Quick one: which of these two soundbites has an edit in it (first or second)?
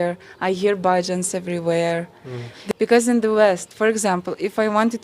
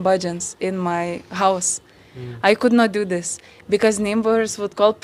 first